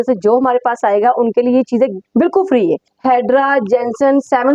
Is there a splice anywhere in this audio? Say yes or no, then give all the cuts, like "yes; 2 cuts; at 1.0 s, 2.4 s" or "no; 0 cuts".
yes; 2 cuts; at 2.0 s, 2.9 s